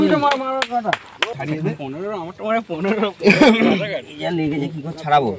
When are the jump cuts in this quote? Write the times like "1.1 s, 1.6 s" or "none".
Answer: 1.3 s